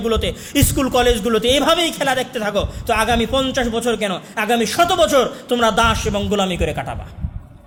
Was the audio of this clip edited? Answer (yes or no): no